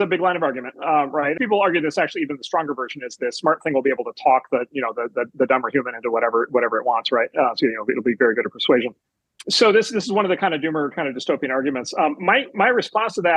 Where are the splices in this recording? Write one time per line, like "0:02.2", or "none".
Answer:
0:01.3
0:09.4